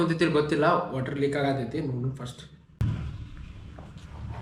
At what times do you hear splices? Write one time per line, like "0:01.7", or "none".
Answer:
none